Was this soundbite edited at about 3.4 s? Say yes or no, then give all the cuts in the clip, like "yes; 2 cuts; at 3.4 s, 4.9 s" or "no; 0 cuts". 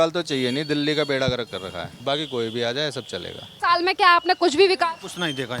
yes; 2 cuts; at 1.8 s, 3.4 s